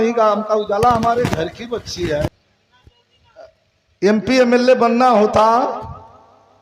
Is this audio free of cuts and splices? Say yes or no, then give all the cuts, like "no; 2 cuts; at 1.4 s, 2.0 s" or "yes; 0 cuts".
no; 1 cut; at 2.3 s